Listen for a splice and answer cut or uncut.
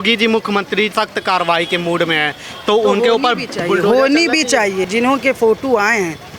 cut